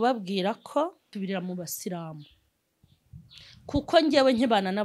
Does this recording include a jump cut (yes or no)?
yes